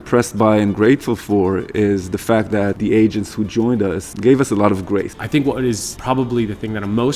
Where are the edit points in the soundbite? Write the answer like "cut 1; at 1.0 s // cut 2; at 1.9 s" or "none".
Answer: cut 1; at 2.8 s // cut 2; at 4.1 s // cut 3; at 5.2 s // cut 4; at 5.9 s